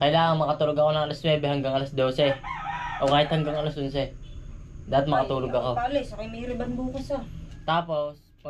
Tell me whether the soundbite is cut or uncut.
uncut